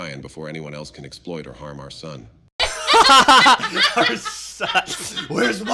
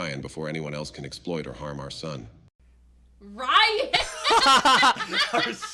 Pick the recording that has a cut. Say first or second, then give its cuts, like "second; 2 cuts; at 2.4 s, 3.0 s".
first; 1 cut; at 2.7 s